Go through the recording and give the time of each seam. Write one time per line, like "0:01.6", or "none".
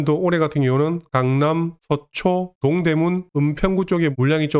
none